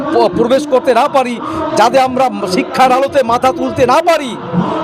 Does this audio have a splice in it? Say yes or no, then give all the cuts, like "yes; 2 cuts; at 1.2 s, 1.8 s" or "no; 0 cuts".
no; 0 cuts